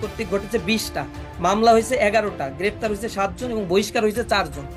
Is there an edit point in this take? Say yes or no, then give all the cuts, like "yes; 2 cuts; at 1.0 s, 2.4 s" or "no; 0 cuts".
no; 0 cuts